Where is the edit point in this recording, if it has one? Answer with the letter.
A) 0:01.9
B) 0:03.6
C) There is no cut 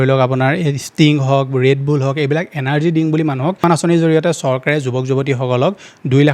B